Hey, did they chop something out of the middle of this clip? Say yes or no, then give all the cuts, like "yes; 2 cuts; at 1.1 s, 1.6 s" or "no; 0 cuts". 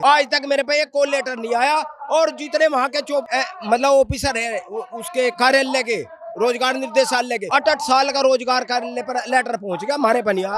yes; 2 cuts; at 3.3 s, 7.4 s